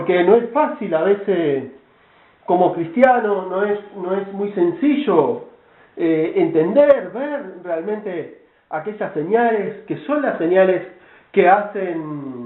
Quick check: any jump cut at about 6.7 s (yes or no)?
no